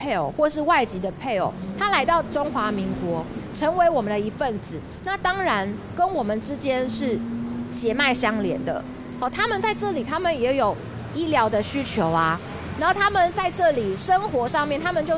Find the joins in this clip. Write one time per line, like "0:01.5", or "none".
none